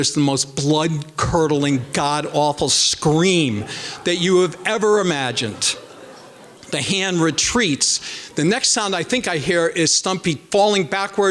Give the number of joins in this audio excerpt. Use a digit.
1